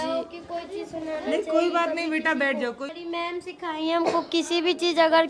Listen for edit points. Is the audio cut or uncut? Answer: cut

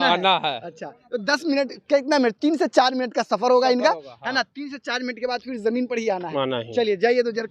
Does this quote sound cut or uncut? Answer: uncut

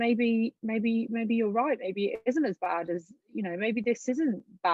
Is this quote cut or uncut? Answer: uncut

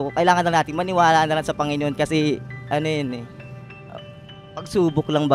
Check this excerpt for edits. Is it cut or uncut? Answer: uncut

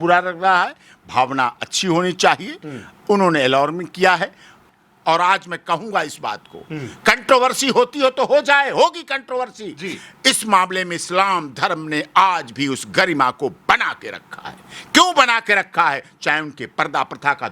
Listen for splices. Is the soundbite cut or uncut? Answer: cut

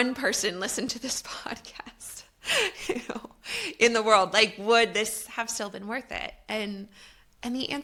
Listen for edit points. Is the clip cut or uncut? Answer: uncut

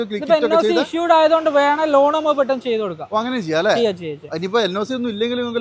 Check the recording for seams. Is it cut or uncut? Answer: uncut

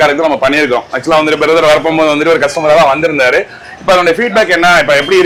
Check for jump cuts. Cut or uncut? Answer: uncut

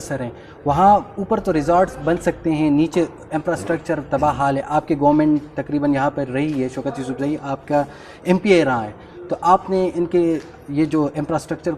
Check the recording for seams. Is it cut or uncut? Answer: uncut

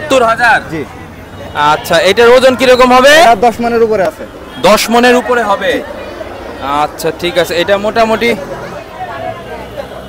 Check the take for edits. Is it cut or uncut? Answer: uncut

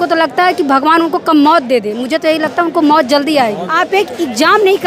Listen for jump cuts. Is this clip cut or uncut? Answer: cut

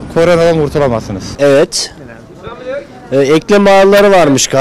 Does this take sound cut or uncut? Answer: uncut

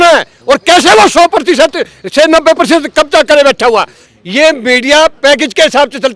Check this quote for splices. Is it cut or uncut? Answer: cut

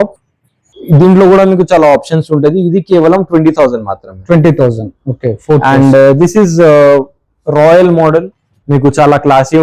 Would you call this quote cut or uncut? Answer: uncut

